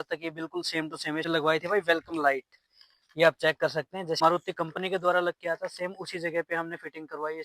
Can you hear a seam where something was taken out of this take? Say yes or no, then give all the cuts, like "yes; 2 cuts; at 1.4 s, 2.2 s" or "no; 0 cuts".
yes; 2 cuts; at 1.3 s, 4.2 s